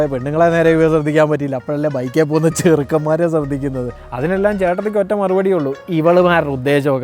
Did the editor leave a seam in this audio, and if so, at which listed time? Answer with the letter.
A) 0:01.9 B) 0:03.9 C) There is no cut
B